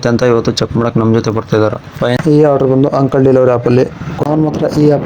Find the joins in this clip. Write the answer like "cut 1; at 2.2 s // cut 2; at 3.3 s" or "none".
cut 1; at 2.2 s // cut 2; at 4.3 s